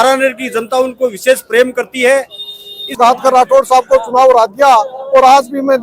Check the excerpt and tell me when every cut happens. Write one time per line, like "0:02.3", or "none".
0:02.9